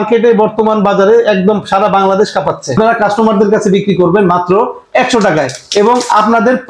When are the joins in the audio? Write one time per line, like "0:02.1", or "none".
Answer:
0:02.8

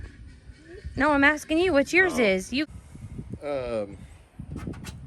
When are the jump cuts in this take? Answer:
0:02.3

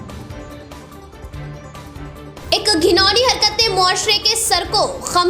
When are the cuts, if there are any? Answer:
0:01.1

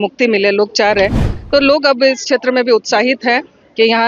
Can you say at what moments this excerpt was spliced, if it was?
0:01.3

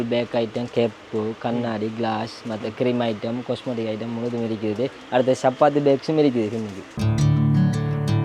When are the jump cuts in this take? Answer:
0:07.0

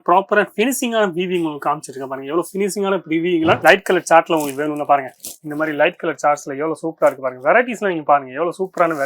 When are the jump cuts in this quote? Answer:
0:03.6

